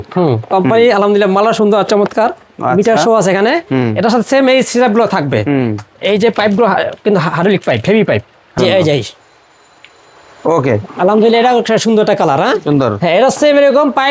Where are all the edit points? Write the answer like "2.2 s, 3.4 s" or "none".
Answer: 8.5 s